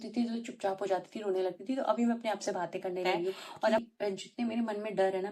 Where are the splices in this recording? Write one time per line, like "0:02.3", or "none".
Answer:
0:03.8